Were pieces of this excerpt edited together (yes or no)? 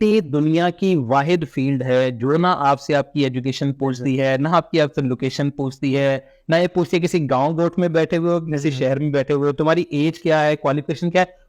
no